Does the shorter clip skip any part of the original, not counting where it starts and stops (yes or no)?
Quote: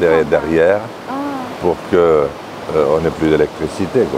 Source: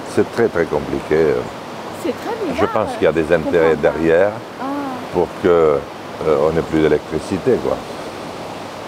no